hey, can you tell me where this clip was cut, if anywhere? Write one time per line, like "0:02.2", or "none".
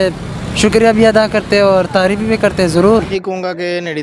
0:03.1